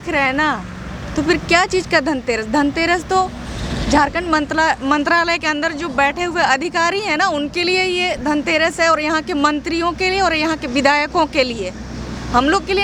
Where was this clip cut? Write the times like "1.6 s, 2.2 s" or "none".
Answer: none